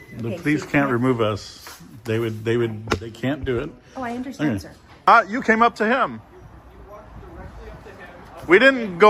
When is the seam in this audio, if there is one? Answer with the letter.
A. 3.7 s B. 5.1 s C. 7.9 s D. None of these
B